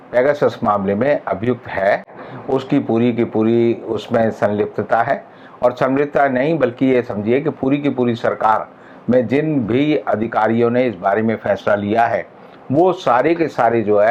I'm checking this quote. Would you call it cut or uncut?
uncut